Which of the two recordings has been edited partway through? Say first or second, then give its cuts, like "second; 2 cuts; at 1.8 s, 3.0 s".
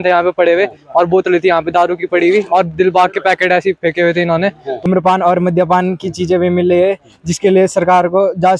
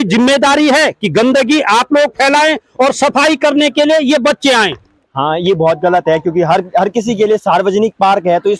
first; 1 cut; at 4.8 s